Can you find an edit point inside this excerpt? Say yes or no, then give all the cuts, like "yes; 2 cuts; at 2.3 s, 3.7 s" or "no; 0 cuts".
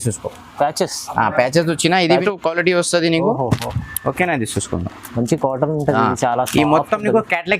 yes; 1 cut; at 2.2 s